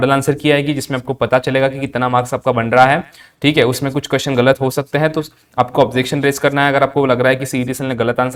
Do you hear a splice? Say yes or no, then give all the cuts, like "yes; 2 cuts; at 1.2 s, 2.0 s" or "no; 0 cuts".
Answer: no; 0 cuts